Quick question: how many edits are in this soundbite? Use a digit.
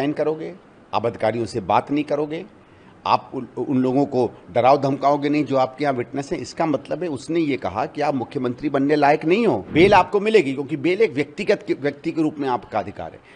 1